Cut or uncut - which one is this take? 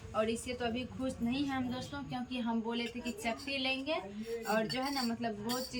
uncut